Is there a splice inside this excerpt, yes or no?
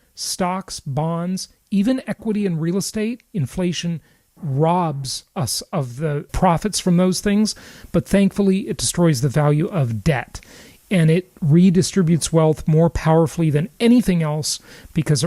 yes